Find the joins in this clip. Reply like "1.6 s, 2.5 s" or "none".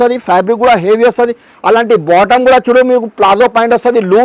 none

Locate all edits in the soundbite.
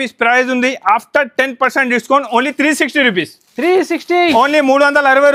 none

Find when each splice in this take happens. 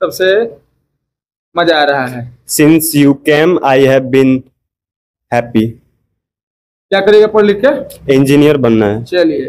none

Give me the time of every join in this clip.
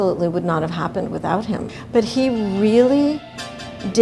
1.7 s

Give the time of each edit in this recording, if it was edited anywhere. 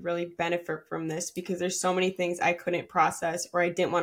none

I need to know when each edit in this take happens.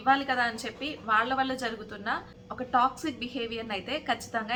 none

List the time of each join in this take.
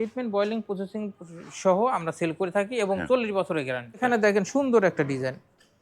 4.0 s

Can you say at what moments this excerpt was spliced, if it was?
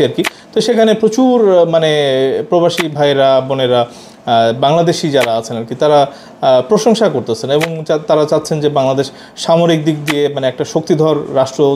none

